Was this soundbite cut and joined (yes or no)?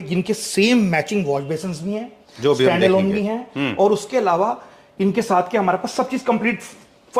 no